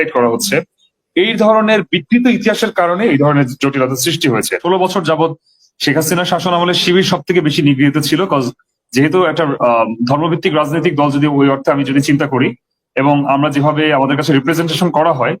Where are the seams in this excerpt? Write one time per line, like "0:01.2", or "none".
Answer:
0:04.6